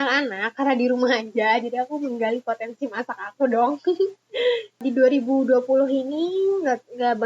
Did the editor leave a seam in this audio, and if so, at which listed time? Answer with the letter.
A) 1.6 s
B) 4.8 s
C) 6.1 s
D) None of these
B